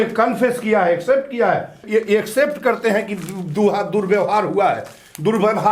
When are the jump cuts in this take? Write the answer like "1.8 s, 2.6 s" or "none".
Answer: 1.8 s